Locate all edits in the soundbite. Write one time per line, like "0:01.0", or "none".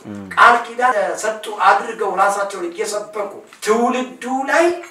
0:00.9
0:03.5